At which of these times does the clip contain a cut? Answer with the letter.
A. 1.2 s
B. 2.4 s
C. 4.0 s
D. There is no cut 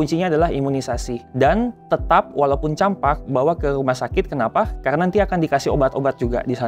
A